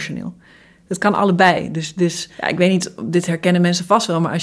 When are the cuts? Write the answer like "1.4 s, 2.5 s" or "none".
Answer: 2.3 s